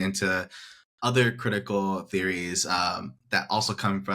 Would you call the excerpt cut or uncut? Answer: uncut